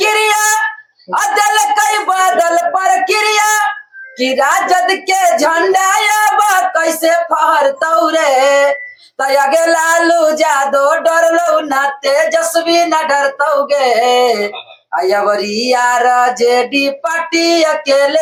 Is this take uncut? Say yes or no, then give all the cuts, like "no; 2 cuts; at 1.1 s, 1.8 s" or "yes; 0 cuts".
yes; 0 cuts